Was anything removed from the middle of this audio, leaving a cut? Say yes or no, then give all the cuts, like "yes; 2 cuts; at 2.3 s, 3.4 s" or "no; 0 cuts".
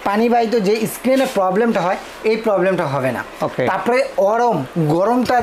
no; 0 cuts